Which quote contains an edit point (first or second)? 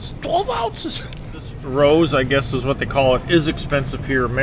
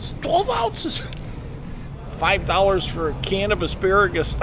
second